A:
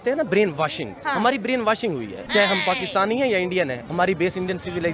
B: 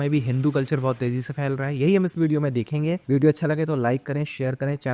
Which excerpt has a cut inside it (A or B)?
A